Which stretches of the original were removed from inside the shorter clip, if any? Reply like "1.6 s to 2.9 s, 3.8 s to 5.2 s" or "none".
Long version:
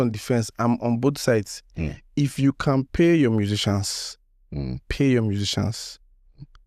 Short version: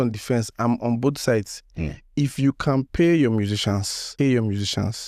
4.0 s to 4.8 s